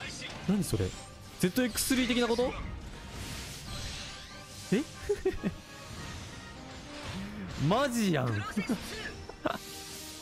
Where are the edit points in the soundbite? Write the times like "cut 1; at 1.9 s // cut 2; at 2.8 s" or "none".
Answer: cut 1; at 6.6 s